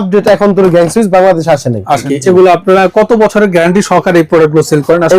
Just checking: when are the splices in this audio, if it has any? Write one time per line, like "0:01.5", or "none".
0:02.1